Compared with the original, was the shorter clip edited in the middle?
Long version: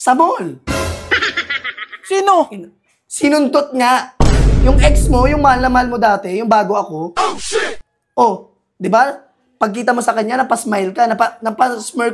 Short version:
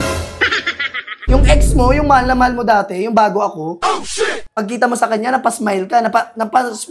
yes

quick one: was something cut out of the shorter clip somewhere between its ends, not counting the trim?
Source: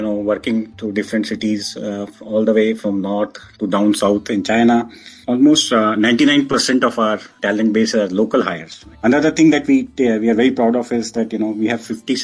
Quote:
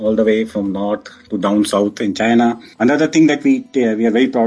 yes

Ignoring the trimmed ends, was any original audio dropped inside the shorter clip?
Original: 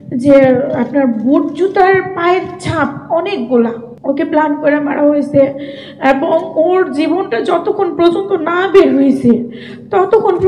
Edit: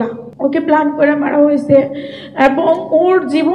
no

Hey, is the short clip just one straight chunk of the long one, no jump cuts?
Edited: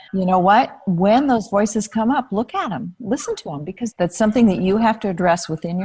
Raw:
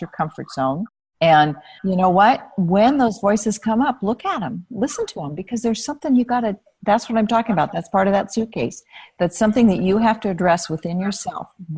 no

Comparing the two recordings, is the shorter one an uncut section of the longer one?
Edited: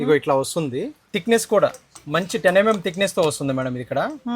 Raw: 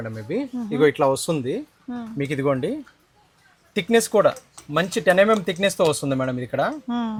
no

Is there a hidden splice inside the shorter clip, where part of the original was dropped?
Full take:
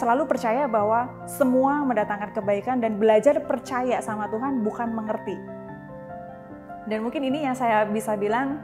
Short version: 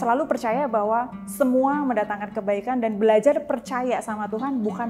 no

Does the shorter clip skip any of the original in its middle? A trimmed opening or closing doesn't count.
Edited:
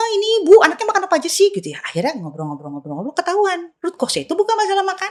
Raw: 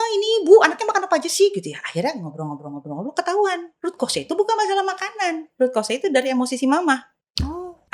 no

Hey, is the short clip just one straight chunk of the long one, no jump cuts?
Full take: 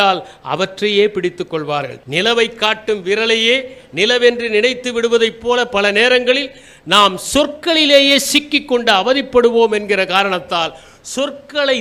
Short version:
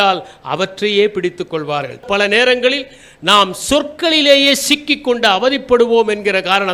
no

